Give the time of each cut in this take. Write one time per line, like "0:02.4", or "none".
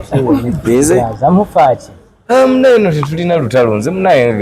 0:01.0